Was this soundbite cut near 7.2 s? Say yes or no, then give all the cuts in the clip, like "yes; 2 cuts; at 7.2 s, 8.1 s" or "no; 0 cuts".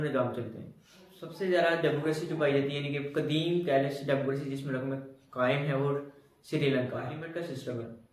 yes; 2 cuts; at 1.2 s, 7.2 s